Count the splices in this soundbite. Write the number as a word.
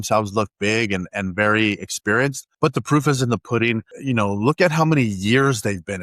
two